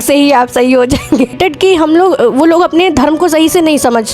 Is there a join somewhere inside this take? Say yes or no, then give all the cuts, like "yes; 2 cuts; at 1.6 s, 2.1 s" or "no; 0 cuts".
yes; 1 cut; at 1.4 s